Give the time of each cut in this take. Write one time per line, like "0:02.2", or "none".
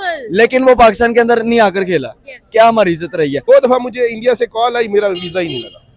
0:03.4